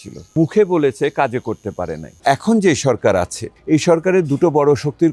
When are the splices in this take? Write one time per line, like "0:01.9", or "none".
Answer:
0:02.2